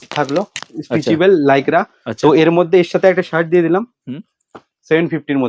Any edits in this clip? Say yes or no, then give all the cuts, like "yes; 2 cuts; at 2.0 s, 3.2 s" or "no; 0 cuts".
no; 0 cuts